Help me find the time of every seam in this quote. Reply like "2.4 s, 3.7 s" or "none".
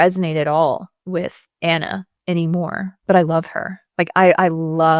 none